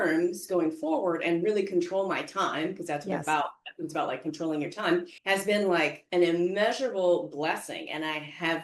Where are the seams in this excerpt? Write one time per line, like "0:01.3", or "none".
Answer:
0:05.1

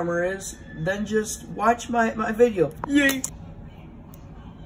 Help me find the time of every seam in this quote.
0:03.3

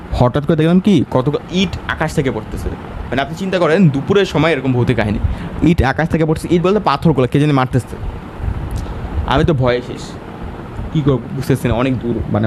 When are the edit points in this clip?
none

